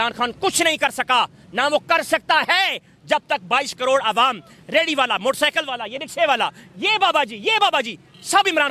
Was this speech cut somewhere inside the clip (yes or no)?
no